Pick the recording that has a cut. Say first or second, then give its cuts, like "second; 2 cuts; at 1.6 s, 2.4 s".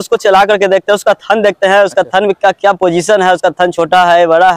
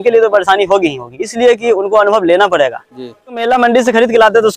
second; 1 cut; at 3.4 s